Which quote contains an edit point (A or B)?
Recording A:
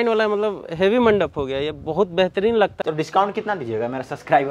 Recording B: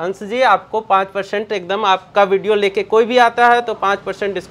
A